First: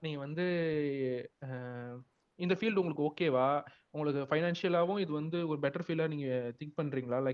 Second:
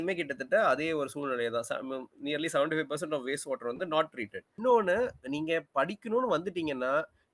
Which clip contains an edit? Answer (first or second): second